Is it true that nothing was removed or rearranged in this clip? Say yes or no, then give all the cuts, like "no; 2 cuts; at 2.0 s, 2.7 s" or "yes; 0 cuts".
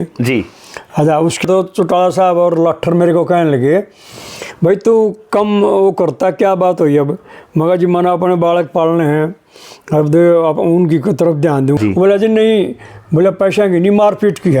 no; 2 cuts; at 1.4 s, 11.8 s